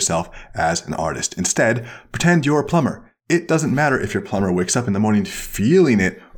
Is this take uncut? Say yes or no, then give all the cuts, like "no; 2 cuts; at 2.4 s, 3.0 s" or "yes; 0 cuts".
no; 1 cut; at 3.1 s